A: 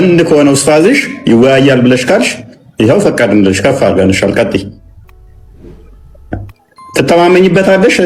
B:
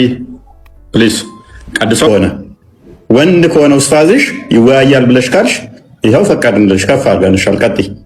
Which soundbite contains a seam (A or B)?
B